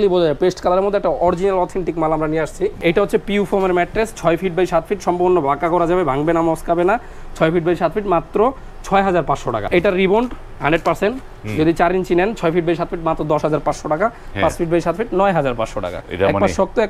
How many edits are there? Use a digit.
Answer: 3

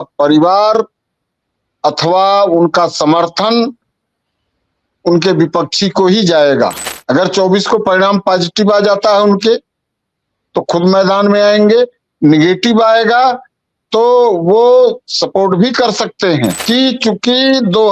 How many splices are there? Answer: 2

